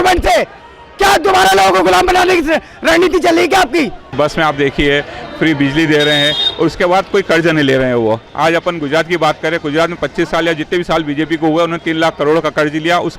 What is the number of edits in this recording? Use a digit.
0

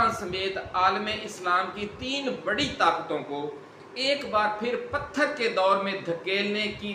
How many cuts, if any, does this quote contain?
0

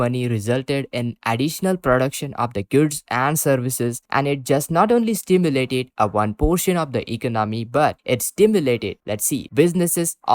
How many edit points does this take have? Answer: 0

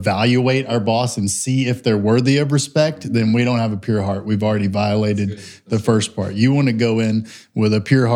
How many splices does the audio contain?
0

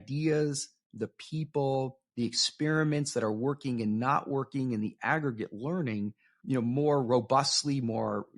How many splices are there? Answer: 1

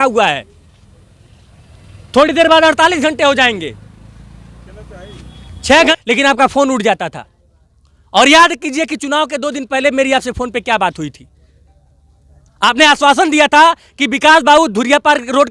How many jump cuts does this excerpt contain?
1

